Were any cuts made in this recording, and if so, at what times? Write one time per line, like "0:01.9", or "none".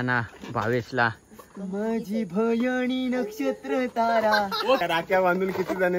0:04.8